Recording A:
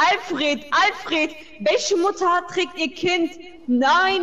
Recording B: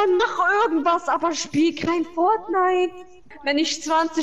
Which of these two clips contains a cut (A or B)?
B